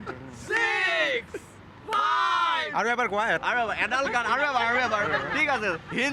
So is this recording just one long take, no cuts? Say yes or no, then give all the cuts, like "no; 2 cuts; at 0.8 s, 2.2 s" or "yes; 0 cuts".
yes; 0 cuts